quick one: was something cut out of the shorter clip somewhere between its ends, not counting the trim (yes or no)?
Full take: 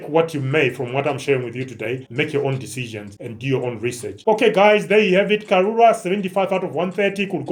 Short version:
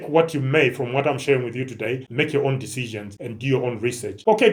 no